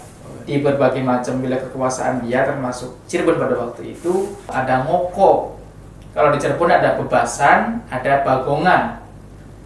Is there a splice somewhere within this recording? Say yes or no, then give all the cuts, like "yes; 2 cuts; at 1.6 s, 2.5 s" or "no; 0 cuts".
yes; 1 cut; at 4.6 s